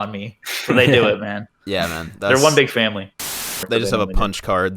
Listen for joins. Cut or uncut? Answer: cut